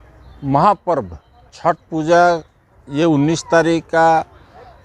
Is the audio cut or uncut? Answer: uncut